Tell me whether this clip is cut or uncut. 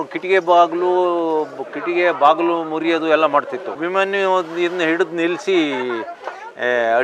cut